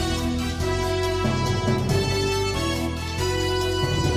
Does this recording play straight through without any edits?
yes; 0 cuts

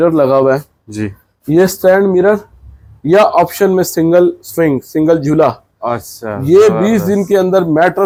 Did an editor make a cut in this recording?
no; 0 cuts

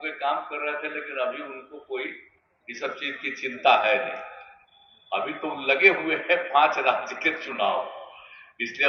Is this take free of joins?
yes; 0 cuts

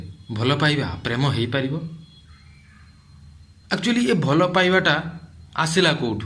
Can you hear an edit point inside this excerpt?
no; 0 cuts

